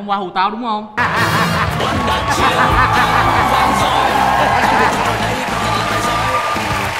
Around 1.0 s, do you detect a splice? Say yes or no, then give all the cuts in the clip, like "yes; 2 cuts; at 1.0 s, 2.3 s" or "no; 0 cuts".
yes; 1 cut; at 1.0 s